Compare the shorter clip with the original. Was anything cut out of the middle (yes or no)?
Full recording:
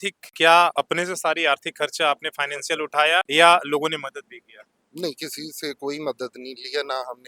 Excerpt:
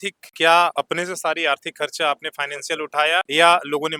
no